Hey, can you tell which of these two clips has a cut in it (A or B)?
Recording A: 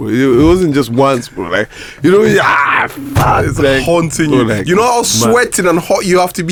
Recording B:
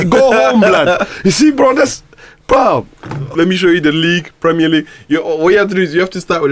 B